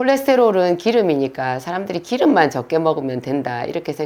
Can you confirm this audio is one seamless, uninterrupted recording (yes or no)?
yes